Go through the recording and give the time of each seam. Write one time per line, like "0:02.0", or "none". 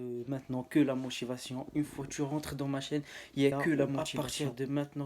0:04.0